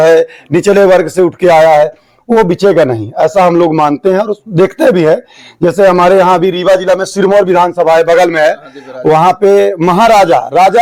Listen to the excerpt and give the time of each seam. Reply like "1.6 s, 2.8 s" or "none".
none